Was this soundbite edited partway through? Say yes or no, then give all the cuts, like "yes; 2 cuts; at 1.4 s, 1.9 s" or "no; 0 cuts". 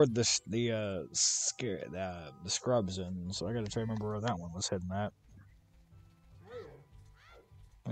no; 0 cuts